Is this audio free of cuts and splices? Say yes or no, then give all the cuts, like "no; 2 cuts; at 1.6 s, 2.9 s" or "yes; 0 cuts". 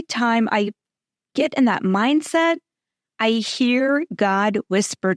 yes; 0 cuts